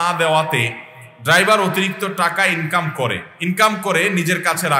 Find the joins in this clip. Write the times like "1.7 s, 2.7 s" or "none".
3.3 s